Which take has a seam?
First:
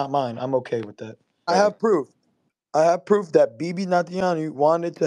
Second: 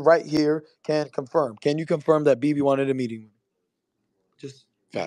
first; 1 cut; at 1.5 s

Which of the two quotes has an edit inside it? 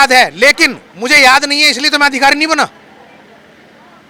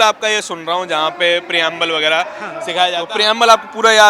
second; 1 cut; at 3.0 s

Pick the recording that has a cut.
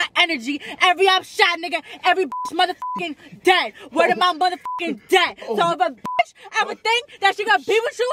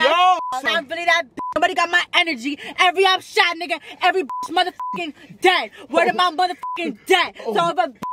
second; 1 cut; at 0.9 s

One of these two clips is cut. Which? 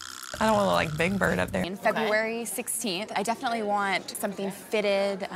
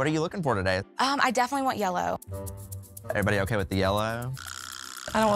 first; 1 cut; at 1.6 s

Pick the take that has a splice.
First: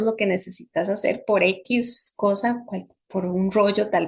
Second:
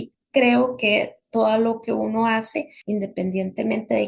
second; 1 cut; at 2.7 s

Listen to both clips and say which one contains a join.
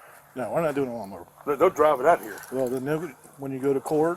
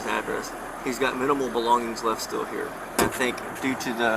second; 1 cut; at 3.0 s

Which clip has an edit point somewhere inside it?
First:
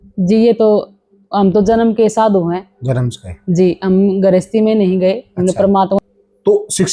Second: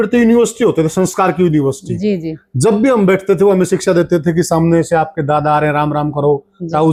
first; 1 cut; at 5.7 s

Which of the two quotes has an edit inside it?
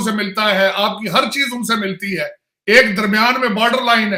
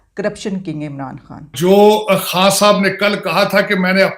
second; 1 cut; at 1.5 s

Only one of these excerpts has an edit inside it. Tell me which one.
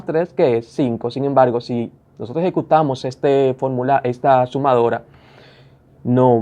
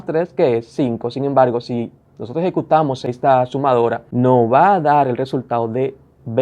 second; 2 cuts; at 3.1 s, 4.0 s

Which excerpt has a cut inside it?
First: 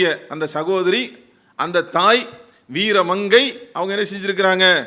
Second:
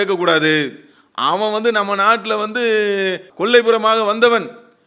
second; 1 cut; at 3.3 s

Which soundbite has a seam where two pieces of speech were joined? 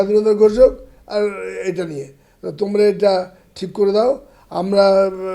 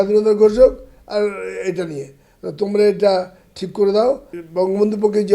second; 1 cut; at 4.4 s

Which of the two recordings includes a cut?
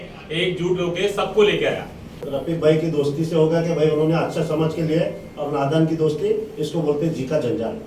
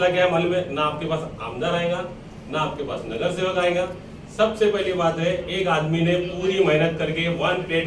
first; 1 cut; at 2.3 s

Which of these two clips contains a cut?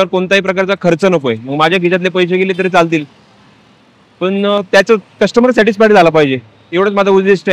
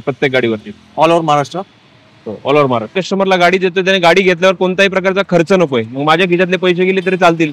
second; 1 cut; at 2.9 s

